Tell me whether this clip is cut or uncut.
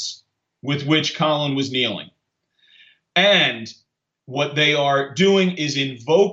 uncut